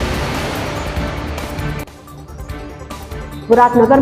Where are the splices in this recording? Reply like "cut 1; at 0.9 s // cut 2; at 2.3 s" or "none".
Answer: none